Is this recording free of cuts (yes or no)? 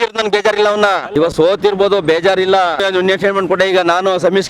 no